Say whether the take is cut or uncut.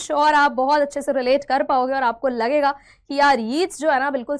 uncut